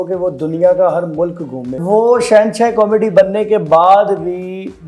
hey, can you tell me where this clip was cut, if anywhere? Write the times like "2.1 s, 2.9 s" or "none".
1.8 s